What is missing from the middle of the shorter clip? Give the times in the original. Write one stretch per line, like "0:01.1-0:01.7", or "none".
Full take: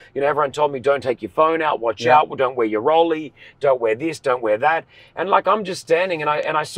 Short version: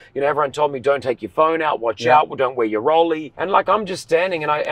0:03.3-0:05.1